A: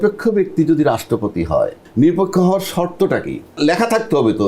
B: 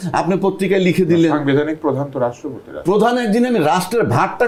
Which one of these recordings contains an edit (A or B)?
A